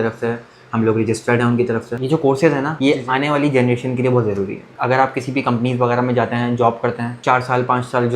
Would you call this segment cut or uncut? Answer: cut